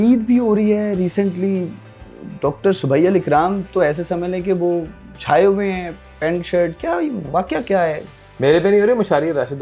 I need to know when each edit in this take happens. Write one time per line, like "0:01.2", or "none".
none